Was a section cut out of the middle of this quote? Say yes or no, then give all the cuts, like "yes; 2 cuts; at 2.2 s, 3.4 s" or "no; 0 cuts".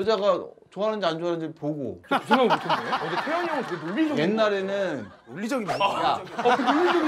no; 0 cuts